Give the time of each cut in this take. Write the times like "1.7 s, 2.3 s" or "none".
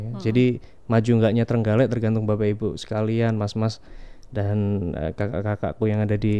none

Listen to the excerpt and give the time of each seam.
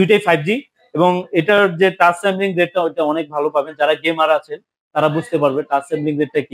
none

